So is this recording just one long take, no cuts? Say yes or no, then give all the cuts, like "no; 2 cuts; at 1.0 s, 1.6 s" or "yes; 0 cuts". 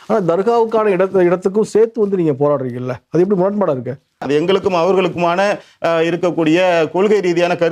no; 1 cut; at 4.2 s